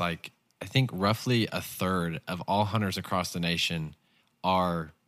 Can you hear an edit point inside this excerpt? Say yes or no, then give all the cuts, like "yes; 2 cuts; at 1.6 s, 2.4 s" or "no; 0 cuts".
no; 0 cuts